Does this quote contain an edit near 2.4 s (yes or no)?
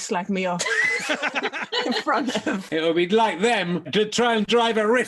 no